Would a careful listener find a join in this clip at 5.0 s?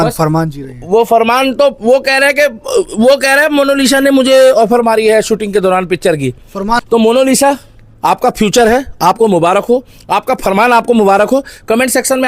no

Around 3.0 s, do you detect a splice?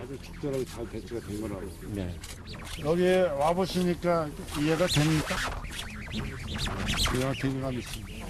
yes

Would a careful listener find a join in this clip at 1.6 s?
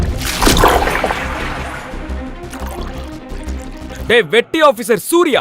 no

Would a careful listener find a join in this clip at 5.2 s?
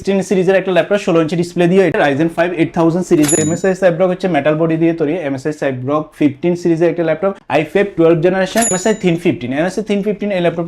no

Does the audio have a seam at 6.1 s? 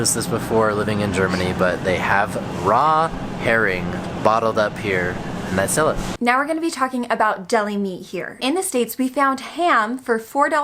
no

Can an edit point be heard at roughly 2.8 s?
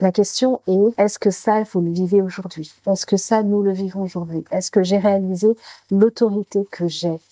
no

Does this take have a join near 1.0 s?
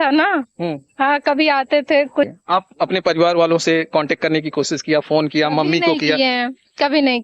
no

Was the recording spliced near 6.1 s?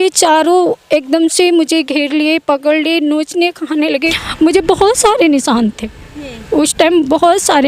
no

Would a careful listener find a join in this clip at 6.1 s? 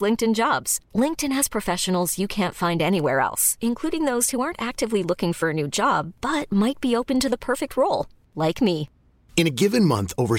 no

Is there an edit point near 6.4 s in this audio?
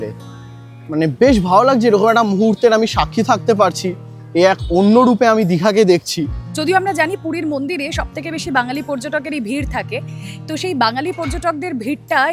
yes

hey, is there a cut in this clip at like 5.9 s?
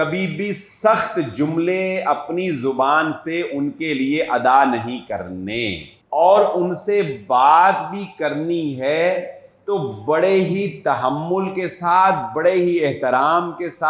yes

